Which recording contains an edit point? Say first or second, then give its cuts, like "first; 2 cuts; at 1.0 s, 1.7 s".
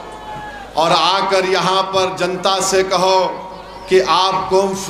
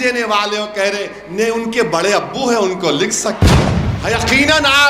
second; 1 cut; at 3.5 s